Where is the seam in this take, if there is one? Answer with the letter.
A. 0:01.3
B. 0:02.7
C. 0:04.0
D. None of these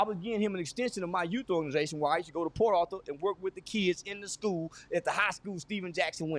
D